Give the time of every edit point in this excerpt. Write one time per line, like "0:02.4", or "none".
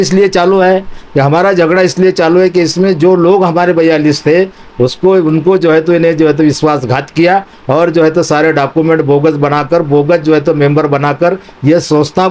none